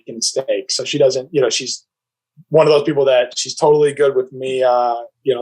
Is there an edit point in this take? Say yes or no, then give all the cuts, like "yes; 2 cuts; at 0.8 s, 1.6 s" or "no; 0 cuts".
no; 0 cuts